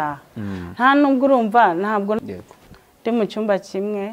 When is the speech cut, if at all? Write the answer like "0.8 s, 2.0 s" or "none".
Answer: 2.2 s